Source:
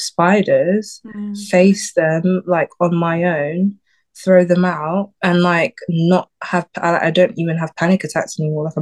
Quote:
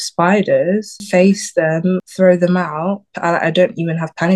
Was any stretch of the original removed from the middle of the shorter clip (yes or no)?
yes